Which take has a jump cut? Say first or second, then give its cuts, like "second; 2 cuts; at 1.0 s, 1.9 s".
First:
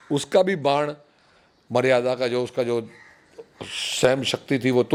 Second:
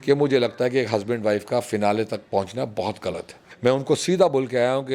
second; 1 cut; at 3.4 s